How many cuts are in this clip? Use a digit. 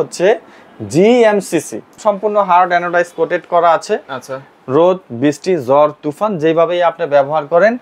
1